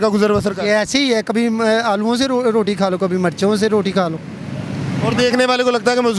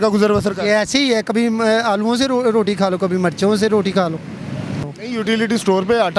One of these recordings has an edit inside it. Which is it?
second; 1 cut; at 5.0 s

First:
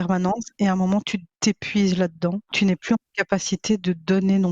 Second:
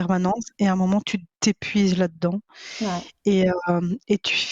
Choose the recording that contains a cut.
first; 1 cut; at 2.5 s

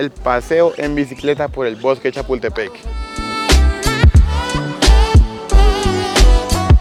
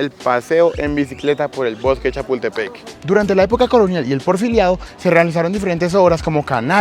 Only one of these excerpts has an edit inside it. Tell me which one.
second; 1 cut; at 2.9 s

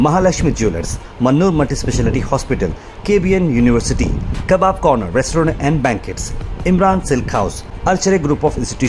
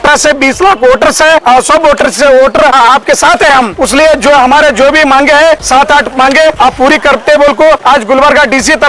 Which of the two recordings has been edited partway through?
second; 6 cuts; at 1.4 s, 2.8 s, 3.7 s, 5.6 s, 6.6 s, 7.8 s

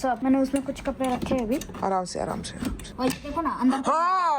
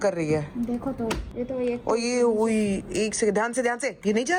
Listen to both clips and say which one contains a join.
first; 1 cut; at 2.8 s

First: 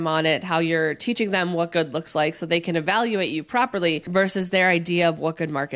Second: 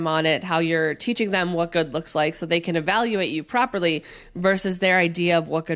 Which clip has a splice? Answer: first; 1 cut; at 4.0 s

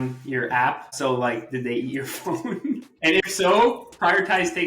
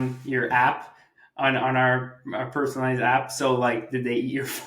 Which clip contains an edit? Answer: first; 2 cuts; at 0.9 s, 2.9 s

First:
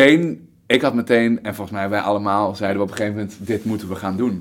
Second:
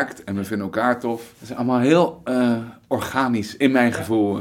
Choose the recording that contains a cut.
second; 1 cut; at 1.4 s

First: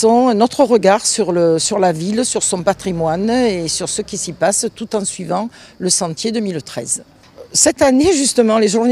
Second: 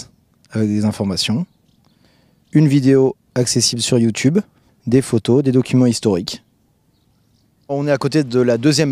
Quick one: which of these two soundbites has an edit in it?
first; 1 cut; at 3.7 s

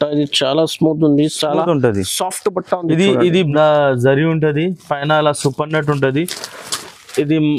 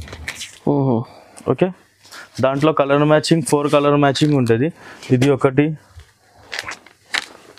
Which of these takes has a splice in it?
first; 1 cut; at 3.5 s

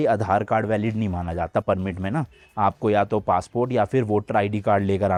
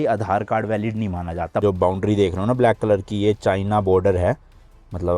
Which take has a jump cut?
second; 1 cut; at 1.6 s

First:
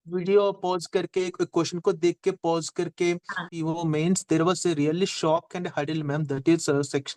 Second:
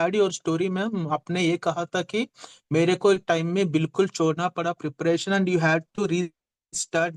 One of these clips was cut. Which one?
first; 1 cut; at 3.5 s

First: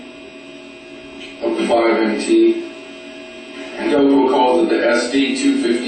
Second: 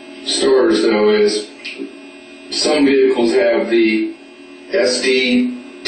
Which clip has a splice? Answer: second; 1 cut; at 4.6 s

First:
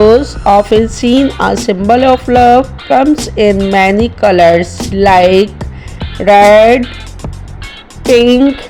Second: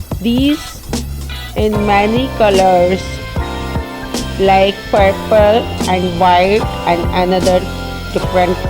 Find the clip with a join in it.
second; 2 cuts; at 3.0 s, 4.4 s

